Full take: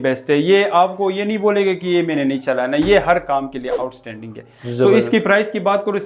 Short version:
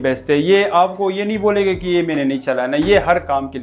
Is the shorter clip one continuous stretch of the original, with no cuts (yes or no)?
yes